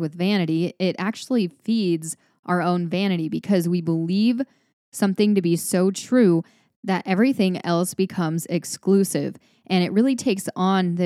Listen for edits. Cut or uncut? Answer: uncut